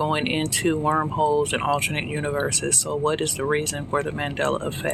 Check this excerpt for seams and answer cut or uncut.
uncut